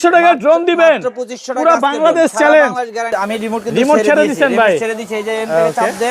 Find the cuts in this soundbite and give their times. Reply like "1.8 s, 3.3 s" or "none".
3.1 s